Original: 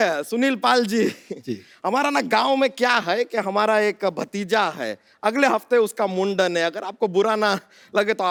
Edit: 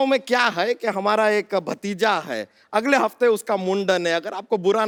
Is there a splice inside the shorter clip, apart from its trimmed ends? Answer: no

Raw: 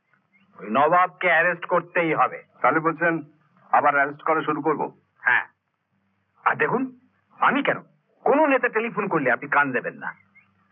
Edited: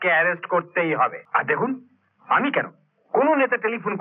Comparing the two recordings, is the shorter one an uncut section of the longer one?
no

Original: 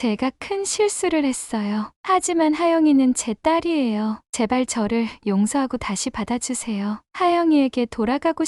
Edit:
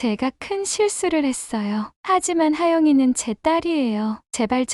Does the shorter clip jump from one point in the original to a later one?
no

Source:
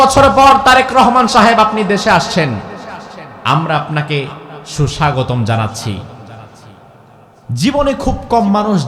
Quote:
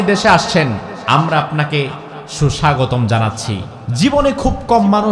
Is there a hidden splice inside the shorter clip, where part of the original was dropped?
yes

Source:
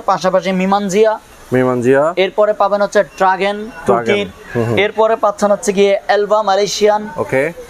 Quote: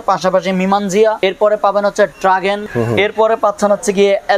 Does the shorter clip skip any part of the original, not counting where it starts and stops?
yes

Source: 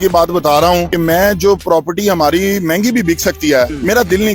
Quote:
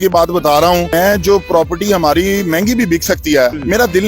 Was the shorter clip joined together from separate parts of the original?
yes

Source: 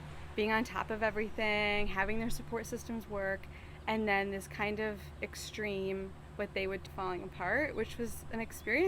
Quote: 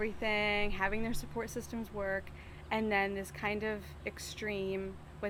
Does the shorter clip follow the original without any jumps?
yes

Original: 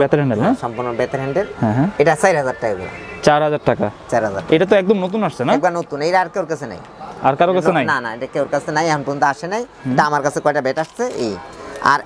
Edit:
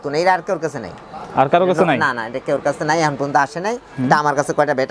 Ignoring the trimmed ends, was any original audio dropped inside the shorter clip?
no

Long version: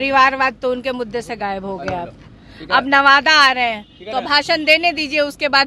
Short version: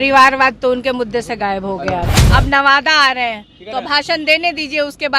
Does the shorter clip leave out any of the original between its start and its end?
yes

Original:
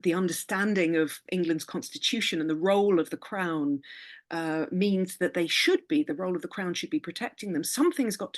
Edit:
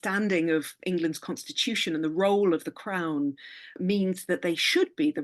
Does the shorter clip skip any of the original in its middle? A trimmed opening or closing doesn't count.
yes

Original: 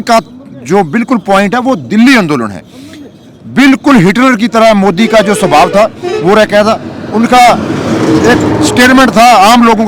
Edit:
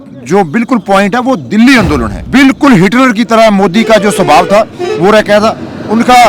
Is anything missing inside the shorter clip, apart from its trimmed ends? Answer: yes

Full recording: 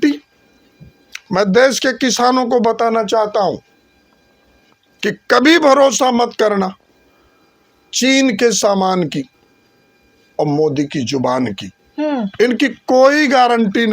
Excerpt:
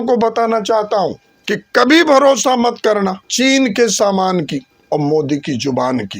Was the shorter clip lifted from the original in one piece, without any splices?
no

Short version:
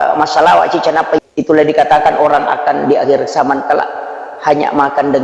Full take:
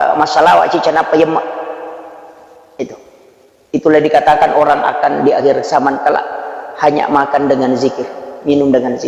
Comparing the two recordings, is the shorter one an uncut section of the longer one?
no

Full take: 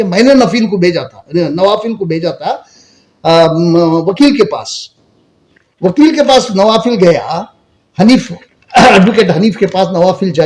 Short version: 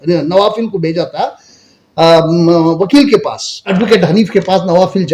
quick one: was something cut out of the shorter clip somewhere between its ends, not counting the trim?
yes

